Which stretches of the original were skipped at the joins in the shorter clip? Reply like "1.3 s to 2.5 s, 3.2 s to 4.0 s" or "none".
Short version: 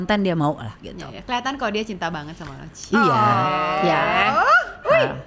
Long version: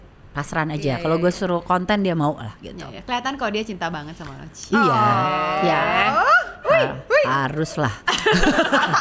none